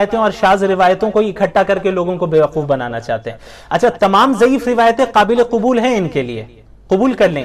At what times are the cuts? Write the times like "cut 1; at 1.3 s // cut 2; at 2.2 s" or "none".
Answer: none